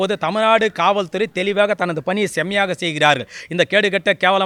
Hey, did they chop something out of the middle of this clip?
no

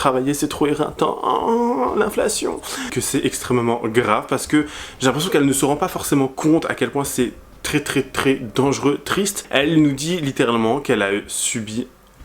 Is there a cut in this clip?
yes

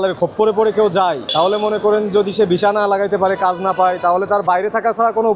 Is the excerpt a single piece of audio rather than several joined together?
yes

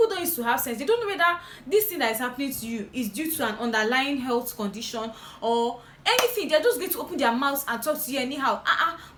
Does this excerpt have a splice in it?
no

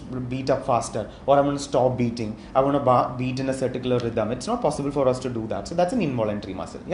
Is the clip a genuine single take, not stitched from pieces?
yes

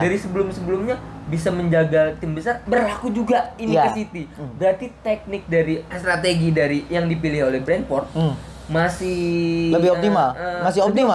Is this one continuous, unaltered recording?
no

